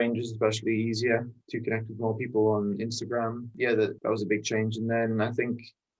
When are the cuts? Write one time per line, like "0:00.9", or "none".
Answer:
none